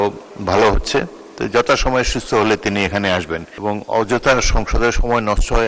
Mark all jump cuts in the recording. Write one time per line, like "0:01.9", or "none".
0:03.5